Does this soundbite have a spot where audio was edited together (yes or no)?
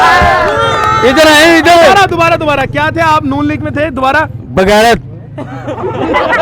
no